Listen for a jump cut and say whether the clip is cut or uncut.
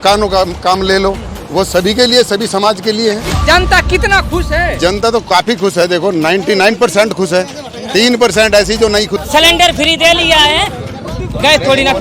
cut